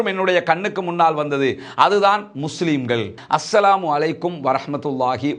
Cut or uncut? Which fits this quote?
cut